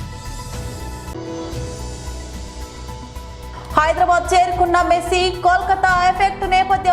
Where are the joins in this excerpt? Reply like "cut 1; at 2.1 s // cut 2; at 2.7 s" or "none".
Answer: cut 1; at 1.1 s